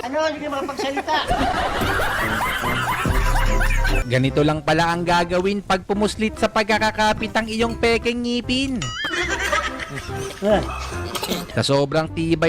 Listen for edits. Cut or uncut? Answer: cut